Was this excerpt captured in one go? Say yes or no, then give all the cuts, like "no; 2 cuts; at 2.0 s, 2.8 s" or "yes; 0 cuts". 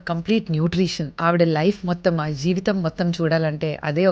no; 1 cut; at 1.2 s